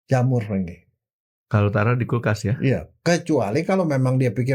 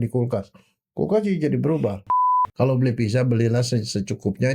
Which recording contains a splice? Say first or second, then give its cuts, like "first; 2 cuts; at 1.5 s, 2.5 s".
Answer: second; 1 cut; at 2.0 s